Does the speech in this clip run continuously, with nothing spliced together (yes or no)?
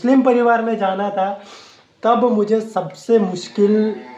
yes